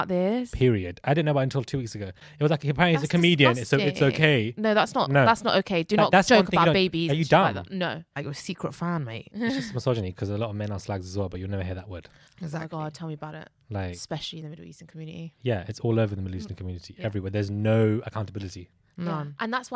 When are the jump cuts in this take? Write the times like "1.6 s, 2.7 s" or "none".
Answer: none